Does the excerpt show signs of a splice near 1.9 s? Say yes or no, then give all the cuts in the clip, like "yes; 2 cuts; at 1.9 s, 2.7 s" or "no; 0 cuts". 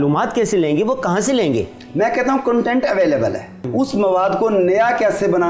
yes; 2 cuts; at 1.9 s, 3.6 s